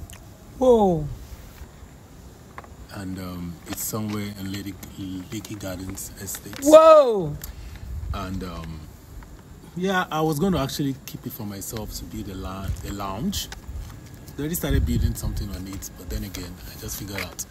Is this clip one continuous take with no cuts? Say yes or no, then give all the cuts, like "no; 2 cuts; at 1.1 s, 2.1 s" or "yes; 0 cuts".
yes; 0 cuts